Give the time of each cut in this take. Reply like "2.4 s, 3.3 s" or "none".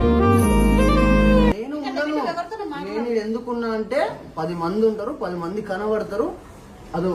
1.6 s

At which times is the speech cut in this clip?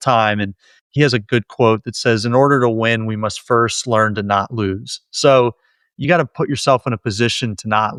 none

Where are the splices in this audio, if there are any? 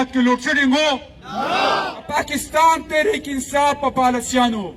2.0 s

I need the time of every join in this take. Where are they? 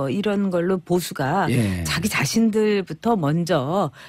none

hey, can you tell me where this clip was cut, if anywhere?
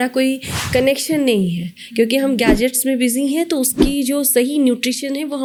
none

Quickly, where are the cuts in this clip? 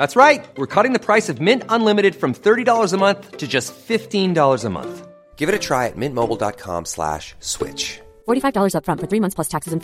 none

